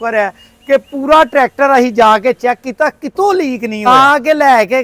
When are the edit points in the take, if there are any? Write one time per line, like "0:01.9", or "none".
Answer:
0:03.9